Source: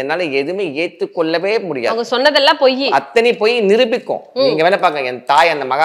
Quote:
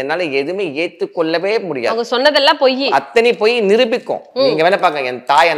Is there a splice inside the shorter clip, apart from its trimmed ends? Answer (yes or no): no